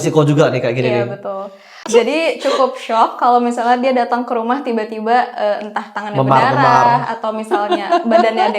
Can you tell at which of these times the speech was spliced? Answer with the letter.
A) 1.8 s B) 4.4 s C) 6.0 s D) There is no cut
A